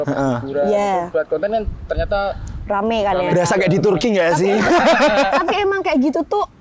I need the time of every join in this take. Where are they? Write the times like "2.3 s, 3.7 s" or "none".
none